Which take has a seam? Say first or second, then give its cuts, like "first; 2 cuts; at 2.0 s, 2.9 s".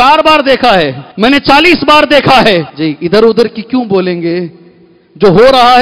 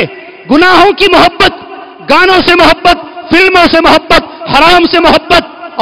first; 2 cuts; at 1.0 s, 2.7 s